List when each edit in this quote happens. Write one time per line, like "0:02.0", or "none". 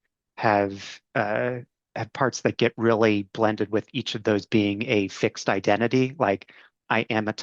none